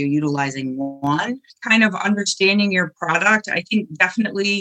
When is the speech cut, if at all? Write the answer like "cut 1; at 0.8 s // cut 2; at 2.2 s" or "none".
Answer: cut 1; at 1.6 s